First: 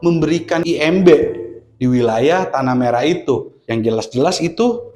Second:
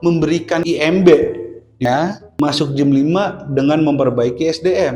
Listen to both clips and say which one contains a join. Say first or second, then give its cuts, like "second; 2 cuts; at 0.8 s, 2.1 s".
second; 1 cut; at 1.8 s